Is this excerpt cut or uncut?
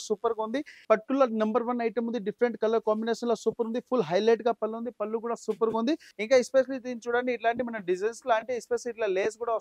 cut